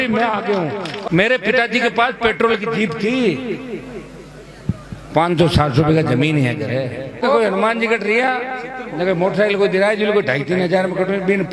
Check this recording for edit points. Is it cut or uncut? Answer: cut